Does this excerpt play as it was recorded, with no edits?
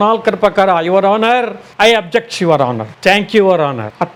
yes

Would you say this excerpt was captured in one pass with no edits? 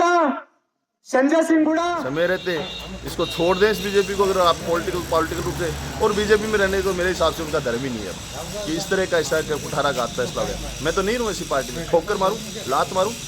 no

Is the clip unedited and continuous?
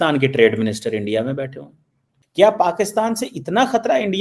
no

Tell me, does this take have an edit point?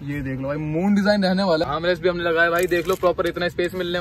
yes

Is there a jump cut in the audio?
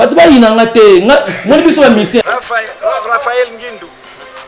yes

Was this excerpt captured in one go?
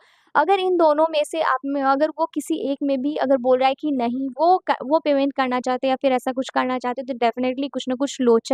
yes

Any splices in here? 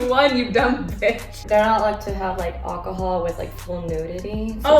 yes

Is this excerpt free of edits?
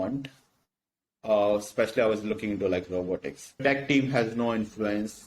no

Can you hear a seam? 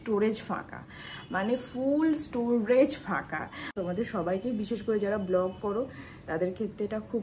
yes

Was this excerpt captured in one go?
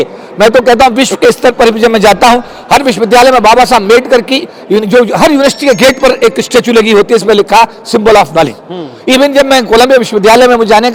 yes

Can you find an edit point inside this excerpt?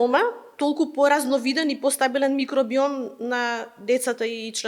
no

